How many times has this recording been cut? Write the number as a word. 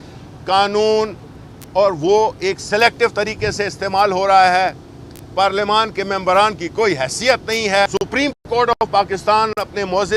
one